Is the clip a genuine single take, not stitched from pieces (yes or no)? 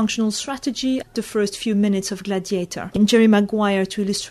no